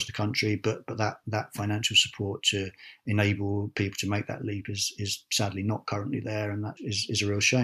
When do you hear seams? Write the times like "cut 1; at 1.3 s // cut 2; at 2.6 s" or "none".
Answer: cut 1; at 6.8 s